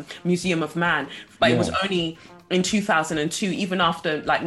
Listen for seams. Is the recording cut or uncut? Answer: cut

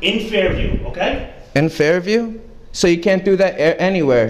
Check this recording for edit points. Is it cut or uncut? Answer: uncut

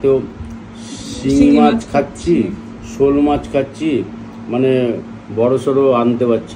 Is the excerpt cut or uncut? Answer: uncut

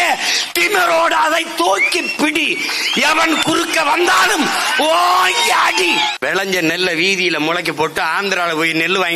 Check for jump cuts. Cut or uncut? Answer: cut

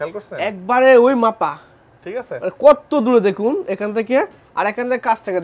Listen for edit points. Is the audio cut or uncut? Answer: uncut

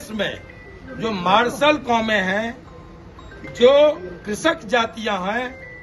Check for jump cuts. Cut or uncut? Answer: uncut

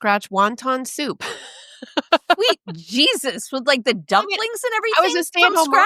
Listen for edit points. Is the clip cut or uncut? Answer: uncut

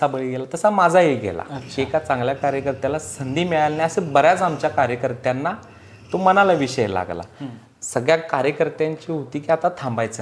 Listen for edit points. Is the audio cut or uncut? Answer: uncut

